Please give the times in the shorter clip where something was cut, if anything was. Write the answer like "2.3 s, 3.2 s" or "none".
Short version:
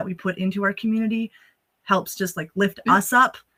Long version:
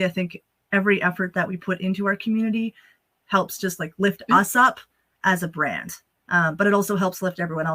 none

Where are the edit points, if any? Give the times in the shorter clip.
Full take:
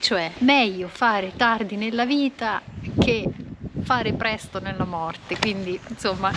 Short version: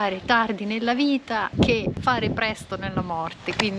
1.7 s

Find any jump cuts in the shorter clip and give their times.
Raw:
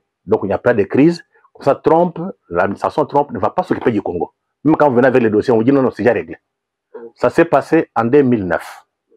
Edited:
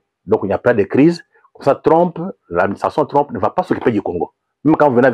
none

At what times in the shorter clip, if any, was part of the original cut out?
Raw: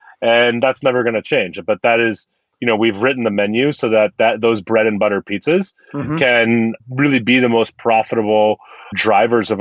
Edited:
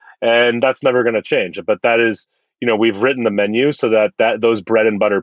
none

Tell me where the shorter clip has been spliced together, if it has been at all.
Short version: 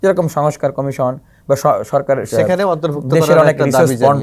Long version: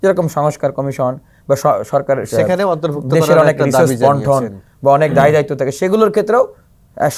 none

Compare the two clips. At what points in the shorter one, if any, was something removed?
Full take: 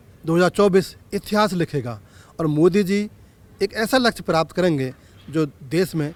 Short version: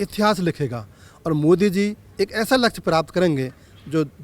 2.0 s

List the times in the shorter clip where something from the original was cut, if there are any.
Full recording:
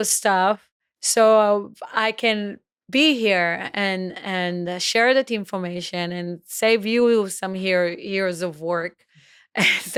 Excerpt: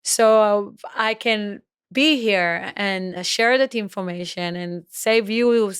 3.2 s

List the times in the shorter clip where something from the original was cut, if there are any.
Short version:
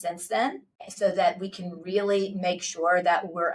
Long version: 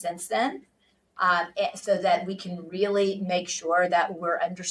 0.9 s

